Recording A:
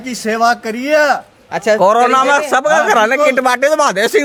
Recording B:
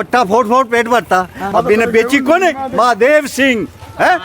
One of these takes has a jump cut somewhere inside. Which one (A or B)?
B